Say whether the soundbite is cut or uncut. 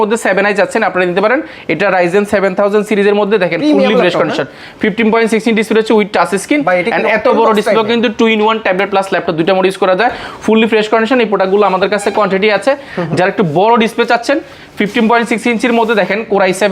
uncut